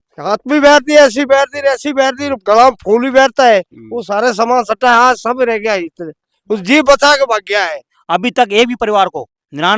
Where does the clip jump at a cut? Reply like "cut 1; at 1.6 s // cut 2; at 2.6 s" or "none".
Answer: cut 1; at 7.9 s